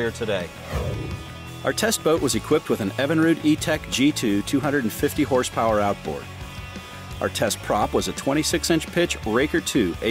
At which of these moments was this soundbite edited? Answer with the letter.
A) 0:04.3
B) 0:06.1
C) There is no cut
A